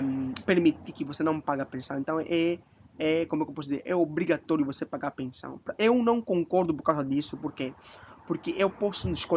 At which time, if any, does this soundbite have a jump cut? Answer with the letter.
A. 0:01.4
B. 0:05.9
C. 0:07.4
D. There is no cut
C